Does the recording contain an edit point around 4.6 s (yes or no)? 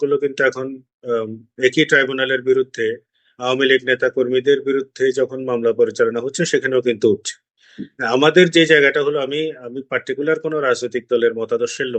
no